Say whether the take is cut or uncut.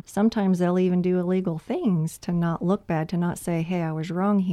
uncut